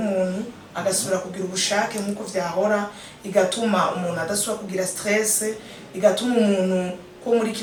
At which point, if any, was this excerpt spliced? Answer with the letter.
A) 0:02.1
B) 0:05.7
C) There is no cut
C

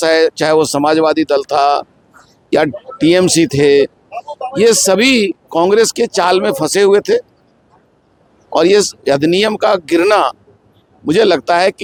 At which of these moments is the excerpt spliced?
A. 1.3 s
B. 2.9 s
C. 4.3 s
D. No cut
D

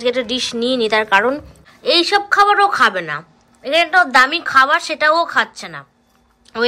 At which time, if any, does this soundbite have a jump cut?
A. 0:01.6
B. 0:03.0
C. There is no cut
A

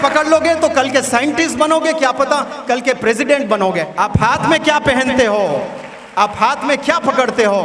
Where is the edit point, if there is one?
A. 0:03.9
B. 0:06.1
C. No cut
A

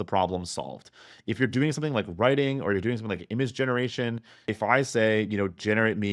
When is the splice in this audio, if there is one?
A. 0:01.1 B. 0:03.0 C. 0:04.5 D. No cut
C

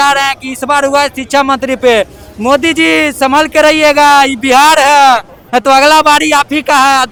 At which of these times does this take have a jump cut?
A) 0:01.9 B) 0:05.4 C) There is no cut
C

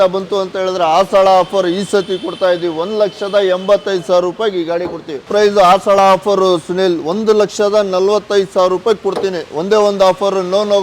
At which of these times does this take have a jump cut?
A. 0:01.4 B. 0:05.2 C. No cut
B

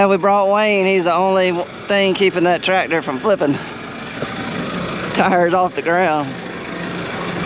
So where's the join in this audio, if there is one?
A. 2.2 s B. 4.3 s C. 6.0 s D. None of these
D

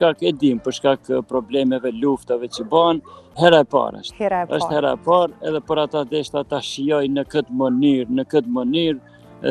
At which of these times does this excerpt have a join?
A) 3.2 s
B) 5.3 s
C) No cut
A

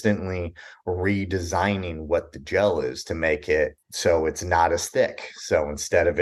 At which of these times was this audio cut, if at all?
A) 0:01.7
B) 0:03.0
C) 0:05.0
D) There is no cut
D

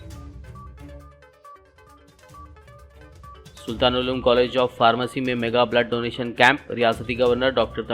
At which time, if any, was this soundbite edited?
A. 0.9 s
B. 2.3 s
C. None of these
A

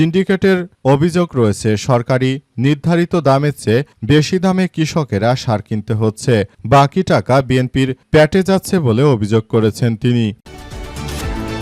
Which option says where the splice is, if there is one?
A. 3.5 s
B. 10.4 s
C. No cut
B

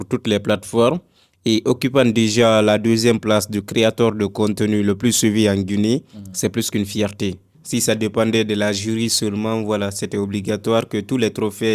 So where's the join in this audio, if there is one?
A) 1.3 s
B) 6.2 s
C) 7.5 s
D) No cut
C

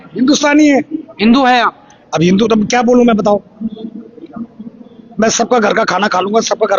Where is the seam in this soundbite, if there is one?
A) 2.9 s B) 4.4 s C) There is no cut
C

